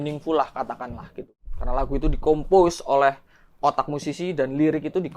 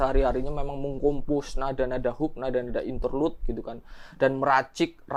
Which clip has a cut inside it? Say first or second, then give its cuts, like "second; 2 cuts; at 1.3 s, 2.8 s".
first; 1 cut; at 1.3 s